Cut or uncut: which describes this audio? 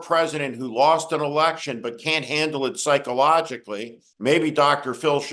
uncut